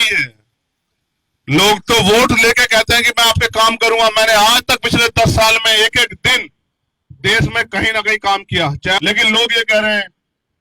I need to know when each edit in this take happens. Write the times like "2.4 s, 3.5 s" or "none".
9.0 s

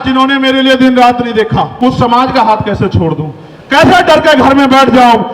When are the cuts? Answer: 1.7 s

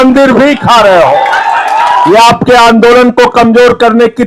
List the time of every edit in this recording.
2.1 s

